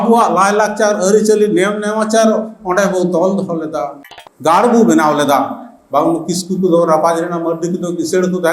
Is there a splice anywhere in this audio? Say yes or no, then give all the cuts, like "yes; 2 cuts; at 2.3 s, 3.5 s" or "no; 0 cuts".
yes; 1 cut; at 4.1 s